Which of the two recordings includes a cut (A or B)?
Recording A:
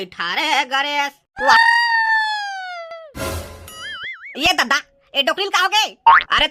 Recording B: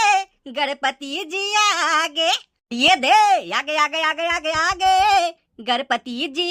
A